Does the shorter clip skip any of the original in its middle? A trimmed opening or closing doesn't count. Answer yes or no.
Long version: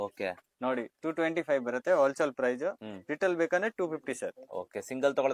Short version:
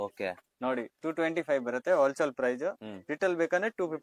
no